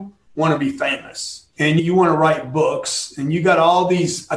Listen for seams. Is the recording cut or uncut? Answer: cut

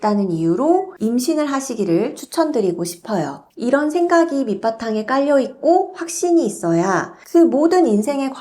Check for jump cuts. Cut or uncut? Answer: cut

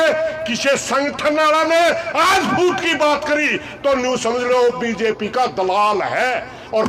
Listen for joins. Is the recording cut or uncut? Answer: uncut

